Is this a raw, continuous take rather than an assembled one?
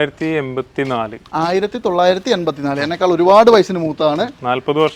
yes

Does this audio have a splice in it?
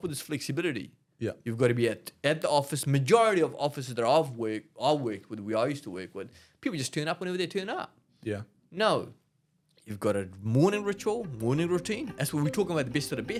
no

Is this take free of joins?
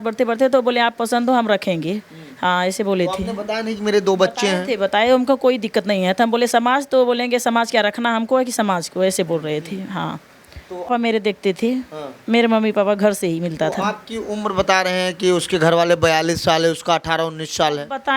no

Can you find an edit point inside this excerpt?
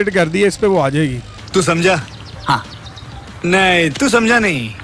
no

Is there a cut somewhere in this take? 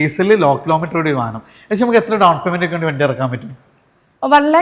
no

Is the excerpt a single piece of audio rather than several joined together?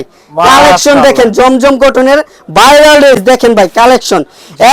yes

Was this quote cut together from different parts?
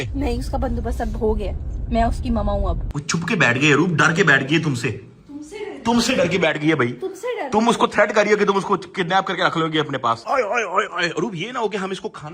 yes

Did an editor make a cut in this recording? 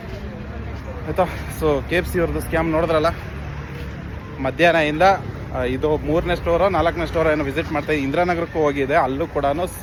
no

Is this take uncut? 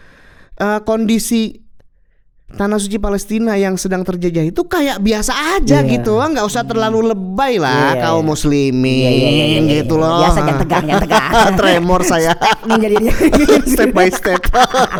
yes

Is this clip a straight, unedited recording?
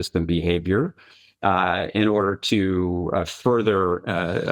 yes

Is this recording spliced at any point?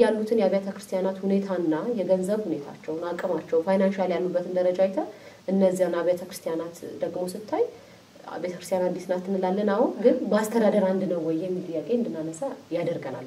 no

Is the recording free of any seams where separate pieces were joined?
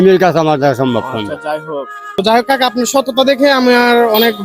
no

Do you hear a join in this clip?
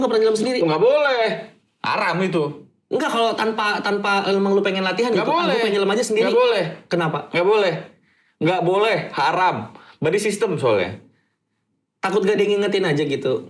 no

